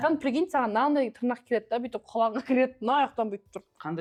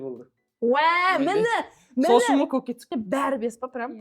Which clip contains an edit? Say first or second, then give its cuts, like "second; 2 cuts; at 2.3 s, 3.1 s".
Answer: second; 1 cut; at 2.9 s